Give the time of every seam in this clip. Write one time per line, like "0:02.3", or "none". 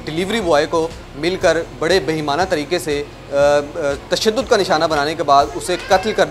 none